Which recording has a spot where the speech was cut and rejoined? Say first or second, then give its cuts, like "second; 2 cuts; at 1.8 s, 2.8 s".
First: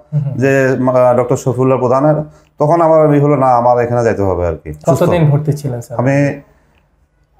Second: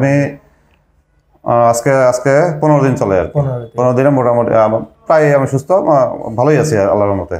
first; 1 cut; at 4.7 s